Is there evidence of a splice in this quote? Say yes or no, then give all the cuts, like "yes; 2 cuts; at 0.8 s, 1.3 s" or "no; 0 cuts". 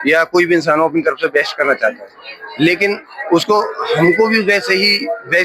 no; 0 cuts